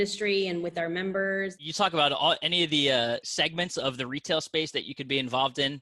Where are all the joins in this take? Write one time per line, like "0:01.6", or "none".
0:01.6
0:03.3